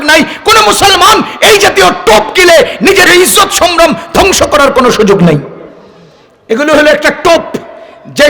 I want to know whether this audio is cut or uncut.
cut